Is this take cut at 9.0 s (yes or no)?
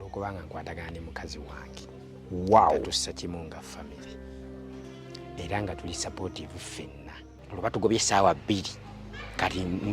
no